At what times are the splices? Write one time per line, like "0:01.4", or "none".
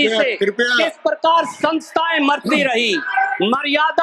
none